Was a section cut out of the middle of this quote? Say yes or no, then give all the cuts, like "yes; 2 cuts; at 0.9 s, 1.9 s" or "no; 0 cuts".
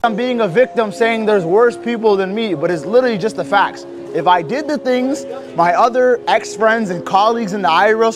no; 0 cuts